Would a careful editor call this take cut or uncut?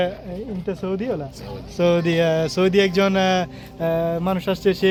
uncut